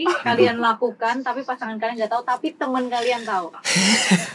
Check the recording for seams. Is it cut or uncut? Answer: uncut